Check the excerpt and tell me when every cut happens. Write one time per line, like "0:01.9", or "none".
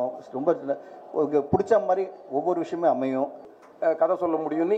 0:03.4